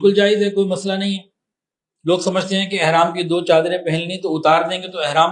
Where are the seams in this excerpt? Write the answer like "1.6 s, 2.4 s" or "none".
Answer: none

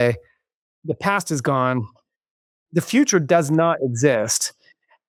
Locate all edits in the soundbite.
none

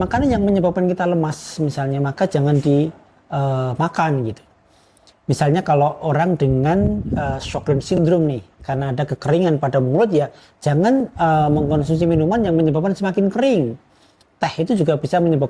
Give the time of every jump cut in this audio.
none

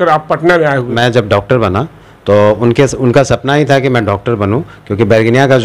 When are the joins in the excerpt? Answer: 0.9 s

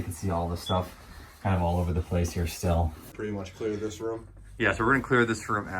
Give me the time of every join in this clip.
3.0 s

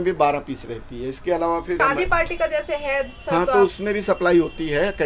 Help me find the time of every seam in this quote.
1.8 s

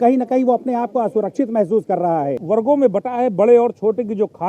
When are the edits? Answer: 2.4 s

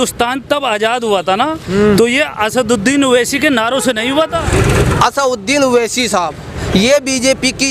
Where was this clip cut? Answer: 4.4 s

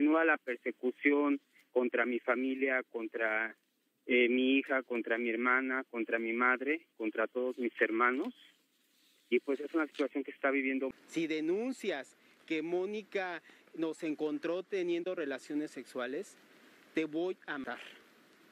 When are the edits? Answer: 10.9 s

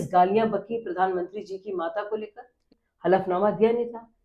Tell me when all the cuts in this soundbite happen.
2.6 s

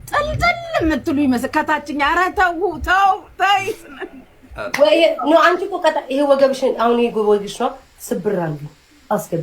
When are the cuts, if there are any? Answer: 4.7 s

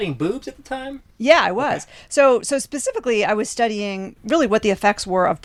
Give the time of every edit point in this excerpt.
none

